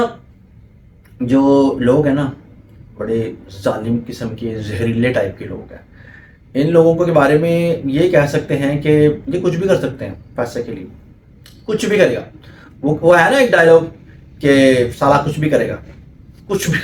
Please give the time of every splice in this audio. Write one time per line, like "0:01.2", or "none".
none